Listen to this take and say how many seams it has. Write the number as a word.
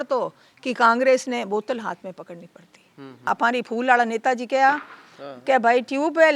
one